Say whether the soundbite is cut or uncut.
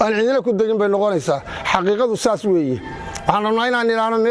uncut